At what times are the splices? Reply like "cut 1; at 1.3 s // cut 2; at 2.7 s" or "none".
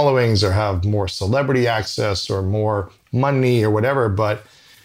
none